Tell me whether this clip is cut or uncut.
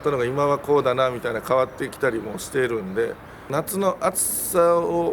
cut